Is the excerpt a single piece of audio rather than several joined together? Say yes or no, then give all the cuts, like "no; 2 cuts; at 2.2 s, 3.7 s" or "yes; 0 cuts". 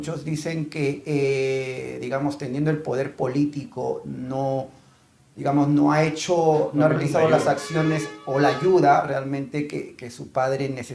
yes; 0 cuts